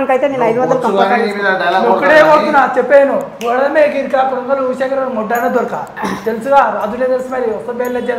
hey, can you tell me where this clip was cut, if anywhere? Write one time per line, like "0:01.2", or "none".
none